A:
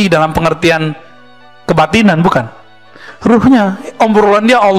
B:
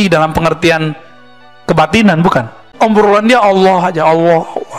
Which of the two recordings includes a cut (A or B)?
B